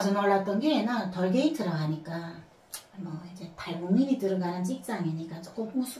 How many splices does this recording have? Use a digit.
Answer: 0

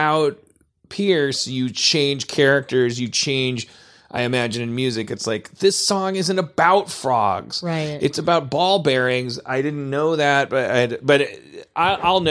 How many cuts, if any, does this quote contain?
0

